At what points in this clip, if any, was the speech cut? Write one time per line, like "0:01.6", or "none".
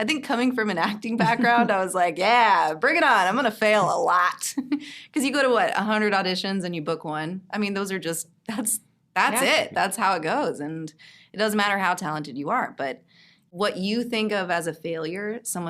0:13.4